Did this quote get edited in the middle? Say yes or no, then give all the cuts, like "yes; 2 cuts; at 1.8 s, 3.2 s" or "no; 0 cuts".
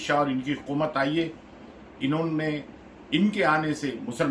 no; 0 cuts